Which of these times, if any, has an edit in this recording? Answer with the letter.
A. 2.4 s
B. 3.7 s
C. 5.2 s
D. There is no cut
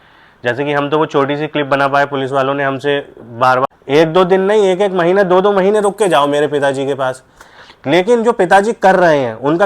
B